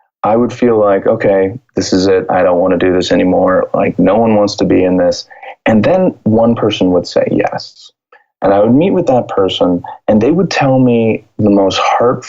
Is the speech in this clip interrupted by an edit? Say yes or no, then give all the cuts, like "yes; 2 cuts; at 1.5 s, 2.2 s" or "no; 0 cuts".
no; 0 cuts